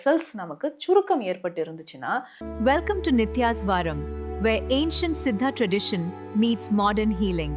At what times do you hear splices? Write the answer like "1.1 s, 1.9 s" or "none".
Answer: 2.4 s